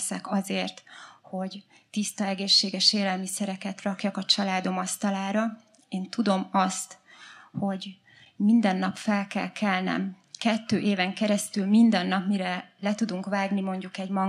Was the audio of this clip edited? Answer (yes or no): no